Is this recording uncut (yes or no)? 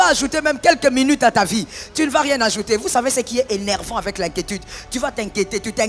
yes